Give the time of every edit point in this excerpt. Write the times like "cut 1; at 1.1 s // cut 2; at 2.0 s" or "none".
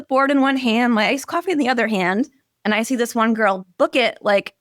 none